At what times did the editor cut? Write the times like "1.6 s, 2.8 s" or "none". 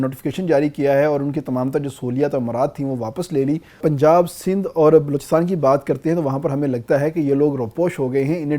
3.7 s